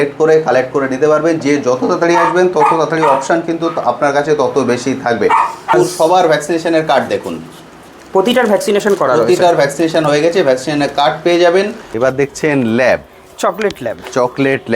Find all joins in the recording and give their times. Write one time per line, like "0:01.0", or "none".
0:05.7
0:11.8